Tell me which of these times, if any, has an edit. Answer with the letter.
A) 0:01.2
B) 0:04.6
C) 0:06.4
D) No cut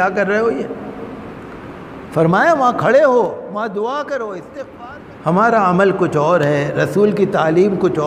B